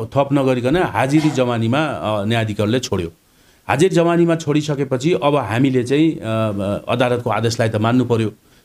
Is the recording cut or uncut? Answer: uncut